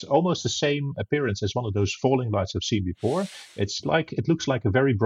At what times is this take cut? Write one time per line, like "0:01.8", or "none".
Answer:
0:00.9